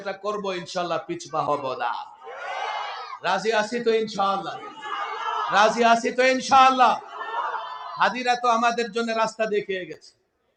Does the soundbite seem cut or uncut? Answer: uncut